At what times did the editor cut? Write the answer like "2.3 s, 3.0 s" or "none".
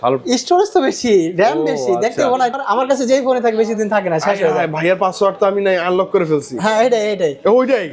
2.6 s